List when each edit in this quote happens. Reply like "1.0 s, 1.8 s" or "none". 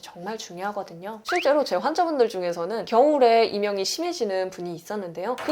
1.2 s